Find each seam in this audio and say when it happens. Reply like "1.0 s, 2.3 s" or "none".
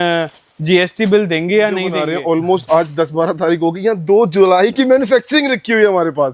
2.0 s